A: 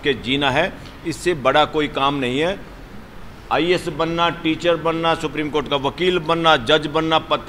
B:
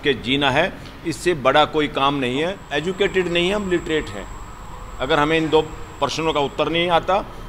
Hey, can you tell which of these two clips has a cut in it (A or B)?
B